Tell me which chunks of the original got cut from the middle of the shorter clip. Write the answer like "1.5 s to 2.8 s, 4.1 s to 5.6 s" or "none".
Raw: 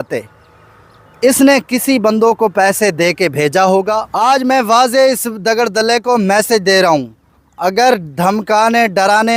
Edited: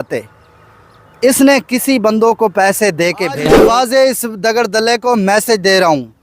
3.4 s to 4.5 s